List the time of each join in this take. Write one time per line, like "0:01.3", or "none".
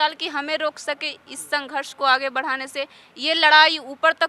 none